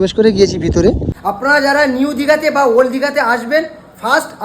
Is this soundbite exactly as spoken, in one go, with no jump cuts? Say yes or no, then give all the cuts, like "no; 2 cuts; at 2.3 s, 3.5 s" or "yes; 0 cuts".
no; 1 cut; at 1.1 s